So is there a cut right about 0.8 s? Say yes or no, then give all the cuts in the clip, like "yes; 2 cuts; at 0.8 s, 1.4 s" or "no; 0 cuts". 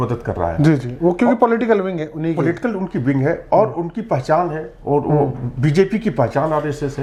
no; 0 cuts